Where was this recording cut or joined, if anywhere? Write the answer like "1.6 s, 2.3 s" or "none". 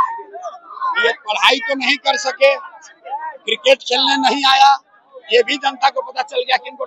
none